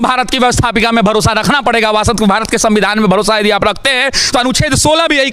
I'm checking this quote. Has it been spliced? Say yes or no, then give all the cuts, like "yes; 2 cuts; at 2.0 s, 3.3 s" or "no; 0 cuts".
no; 0 cuts